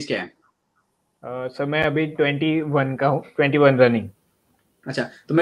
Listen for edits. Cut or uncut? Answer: uncut